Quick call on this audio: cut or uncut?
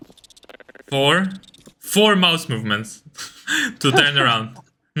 uncut